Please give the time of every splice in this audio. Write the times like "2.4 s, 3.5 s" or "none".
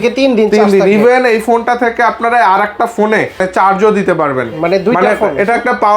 none